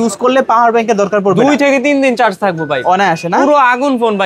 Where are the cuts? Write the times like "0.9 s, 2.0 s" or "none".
none